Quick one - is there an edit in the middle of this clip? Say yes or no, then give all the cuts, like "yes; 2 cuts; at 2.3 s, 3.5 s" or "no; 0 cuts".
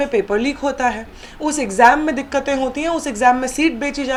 no; 0 cuts